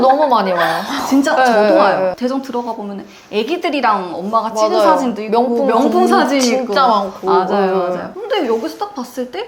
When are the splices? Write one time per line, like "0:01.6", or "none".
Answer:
0:08.1